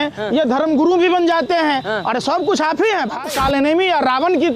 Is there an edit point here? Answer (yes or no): yes